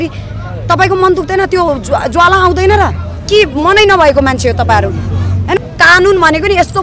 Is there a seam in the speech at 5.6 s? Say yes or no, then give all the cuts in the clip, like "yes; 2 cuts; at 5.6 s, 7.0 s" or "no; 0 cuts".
yes; 1 cut; at 5.6 s